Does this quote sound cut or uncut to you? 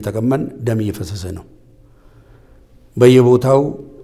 uncut